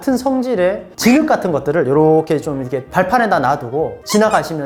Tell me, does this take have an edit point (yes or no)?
no